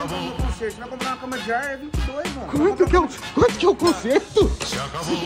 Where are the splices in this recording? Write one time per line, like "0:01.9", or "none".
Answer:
none